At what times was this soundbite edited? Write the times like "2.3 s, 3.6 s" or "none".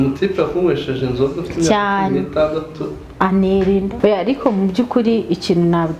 3.9 s